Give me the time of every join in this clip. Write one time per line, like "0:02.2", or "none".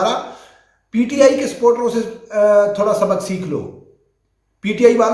none